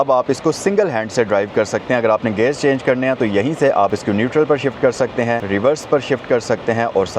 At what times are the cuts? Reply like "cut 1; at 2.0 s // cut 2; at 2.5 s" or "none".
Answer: cut 1; at 3.9 s // cut 2; at 5.4 s